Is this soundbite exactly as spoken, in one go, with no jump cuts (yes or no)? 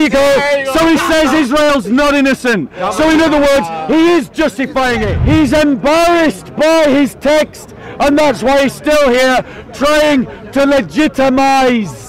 no